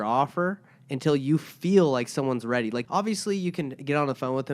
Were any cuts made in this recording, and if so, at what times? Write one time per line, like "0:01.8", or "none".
0:02.9